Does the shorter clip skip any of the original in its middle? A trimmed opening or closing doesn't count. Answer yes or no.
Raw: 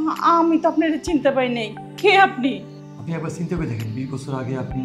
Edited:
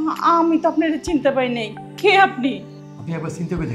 no